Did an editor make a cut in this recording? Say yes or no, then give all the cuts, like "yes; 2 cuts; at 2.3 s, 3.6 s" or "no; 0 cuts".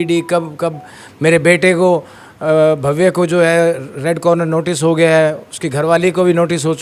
no; 0 cuts